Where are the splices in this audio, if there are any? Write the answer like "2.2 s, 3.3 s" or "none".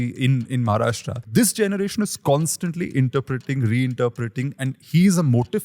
1.2 s